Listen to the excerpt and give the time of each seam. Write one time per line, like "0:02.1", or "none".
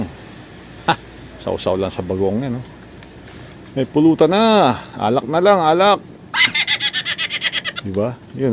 none